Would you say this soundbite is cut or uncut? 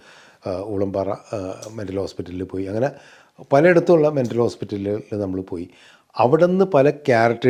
uncut